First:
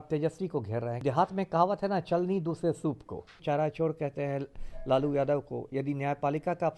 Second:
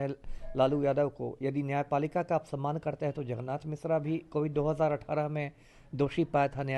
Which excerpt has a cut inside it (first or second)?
first